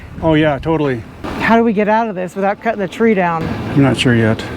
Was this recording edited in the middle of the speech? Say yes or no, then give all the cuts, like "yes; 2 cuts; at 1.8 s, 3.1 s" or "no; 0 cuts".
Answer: yes; 2 cuts; at 1.3 s, 3.6 s